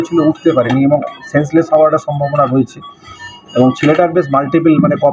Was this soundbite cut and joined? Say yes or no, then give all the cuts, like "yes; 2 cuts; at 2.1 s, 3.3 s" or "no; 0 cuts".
no; 0 cuts